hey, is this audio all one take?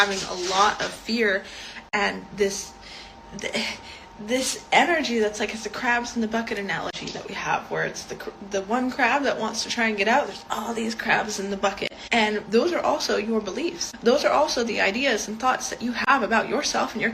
no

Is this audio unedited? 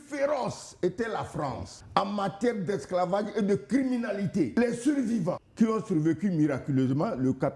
no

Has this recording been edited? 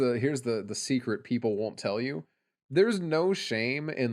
no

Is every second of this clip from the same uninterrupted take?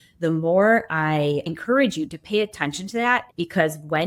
no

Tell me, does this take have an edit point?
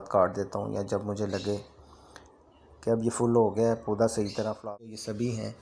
yes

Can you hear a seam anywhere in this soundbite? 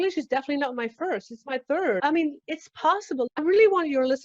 yes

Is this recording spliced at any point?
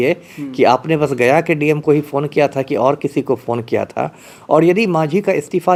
no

